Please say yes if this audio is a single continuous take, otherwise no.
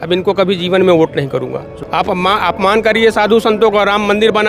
no